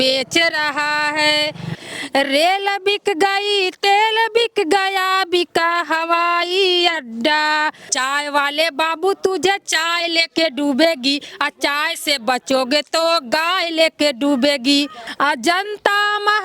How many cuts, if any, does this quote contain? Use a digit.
3